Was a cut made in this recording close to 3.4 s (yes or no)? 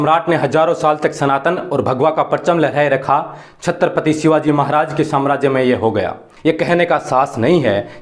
no